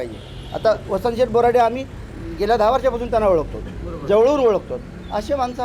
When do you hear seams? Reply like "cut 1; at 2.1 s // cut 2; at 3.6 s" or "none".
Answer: none